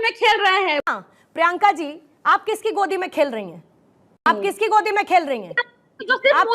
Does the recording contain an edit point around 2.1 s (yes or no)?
no